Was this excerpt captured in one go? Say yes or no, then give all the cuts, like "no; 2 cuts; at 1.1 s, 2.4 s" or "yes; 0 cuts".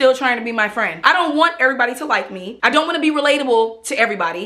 no; 2 cuts; at 0.9 s, 2.4 s